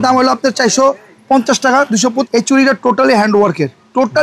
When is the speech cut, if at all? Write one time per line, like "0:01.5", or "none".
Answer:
0:02.3